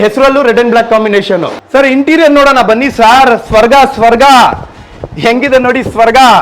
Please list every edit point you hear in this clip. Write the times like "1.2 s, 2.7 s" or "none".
1.6 s